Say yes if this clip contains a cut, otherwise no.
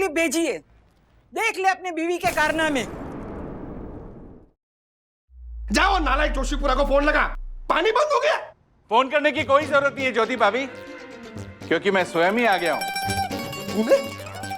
yes